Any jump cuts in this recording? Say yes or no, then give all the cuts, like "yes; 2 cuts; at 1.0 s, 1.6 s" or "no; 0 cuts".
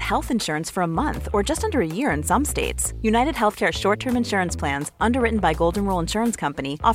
no; 0 cuts